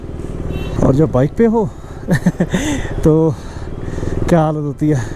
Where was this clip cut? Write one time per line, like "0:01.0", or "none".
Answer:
none